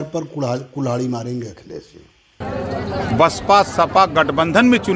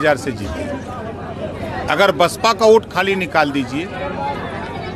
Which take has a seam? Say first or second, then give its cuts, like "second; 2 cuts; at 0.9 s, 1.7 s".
first; 1 cut; at 2.4 s